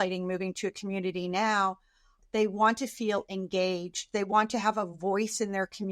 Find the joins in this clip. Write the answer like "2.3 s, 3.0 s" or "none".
2.1 s